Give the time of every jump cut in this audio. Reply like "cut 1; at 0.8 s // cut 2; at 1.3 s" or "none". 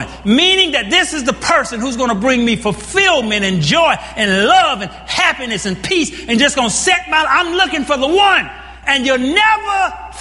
none

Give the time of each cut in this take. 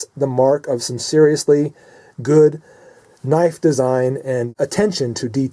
cut 1; at 4.5 s

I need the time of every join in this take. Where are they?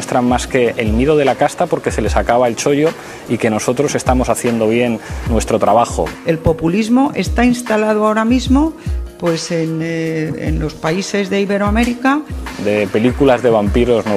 cut 1; at 11.4 s

